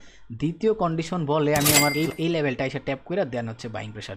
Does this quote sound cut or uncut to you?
cut